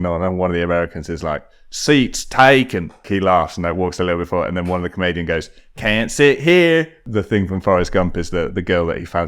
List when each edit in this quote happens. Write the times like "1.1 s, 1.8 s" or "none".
3.1 s, 7.0 s